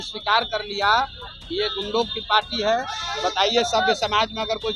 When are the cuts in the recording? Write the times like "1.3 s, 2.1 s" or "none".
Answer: none

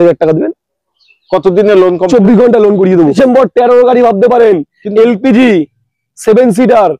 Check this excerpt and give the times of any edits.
3.1 s

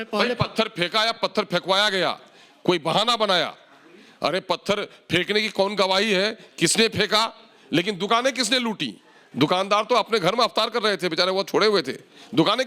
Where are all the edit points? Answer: none

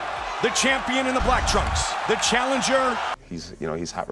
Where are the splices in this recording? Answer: 3.1 s

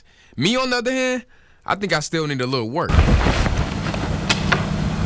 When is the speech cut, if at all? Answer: 2.9 s

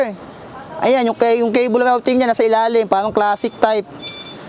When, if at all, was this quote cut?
none

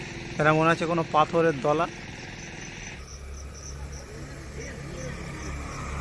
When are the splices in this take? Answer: 3.2 s

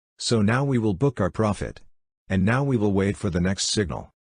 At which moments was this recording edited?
none

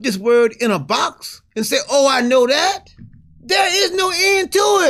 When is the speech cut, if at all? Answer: none

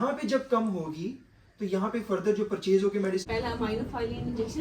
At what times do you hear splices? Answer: 3.2 s

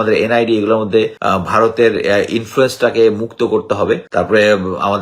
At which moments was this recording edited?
1.2 s, 4.1 s

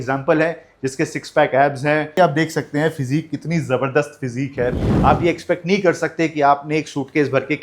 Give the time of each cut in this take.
2.1 s, 4.9 s

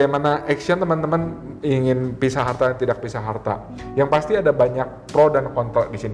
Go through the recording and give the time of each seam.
none

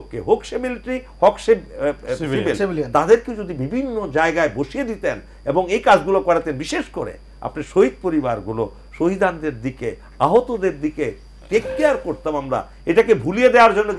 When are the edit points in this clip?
none

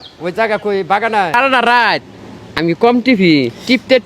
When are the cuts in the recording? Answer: 1.3 s

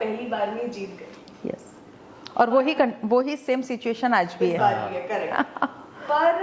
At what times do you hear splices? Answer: none

